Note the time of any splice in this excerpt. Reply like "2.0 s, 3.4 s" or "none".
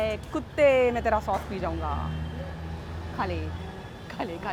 none